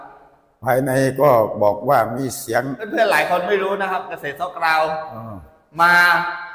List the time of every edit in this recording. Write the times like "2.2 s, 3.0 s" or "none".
2.8 s